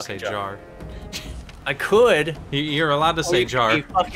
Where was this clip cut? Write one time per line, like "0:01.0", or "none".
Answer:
0:01.5